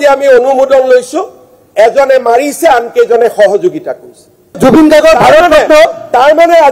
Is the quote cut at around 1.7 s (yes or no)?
no